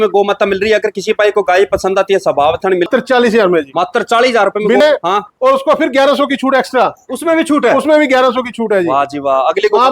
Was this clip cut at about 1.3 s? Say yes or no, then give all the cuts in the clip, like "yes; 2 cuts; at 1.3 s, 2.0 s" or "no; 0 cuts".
no; 2 cuts; at 2.9 s, 4.8 s